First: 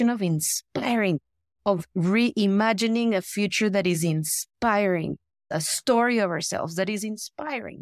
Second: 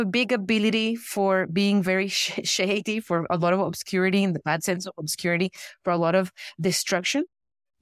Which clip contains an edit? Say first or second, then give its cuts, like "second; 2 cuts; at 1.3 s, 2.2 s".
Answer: first; 1 cut; at 5.5 s